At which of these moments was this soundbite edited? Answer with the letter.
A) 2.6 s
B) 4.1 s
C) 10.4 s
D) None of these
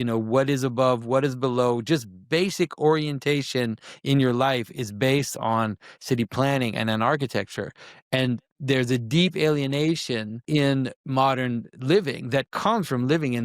C